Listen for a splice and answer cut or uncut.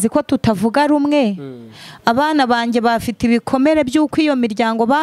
uncut